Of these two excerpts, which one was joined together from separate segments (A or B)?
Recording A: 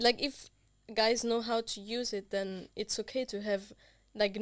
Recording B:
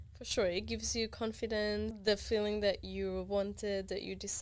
B